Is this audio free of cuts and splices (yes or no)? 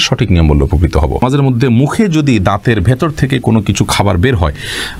no